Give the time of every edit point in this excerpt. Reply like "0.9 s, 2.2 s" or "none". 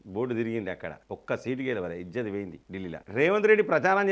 3.0 s